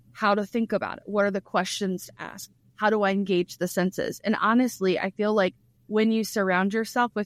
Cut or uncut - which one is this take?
uncut